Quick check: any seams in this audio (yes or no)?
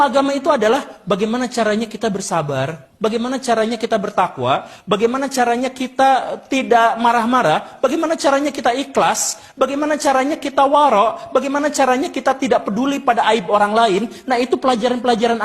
yes